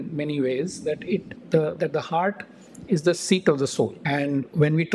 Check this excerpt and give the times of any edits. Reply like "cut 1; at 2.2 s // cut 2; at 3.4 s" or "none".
cut 1; at 4.0 s